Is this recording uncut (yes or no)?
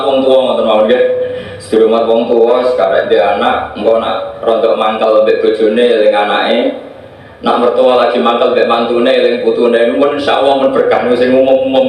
no